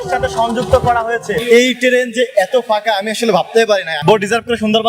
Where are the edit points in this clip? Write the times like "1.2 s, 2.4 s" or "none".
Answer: 1.4 s, 4.0 s